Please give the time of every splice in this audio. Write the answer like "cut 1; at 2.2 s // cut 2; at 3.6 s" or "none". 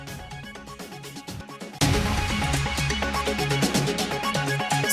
none